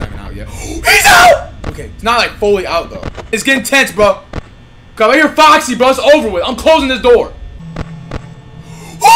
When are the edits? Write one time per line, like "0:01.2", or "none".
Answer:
0:03.3
0:07.5